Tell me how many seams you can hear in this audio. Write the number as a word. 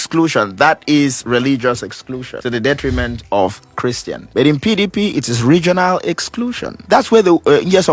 three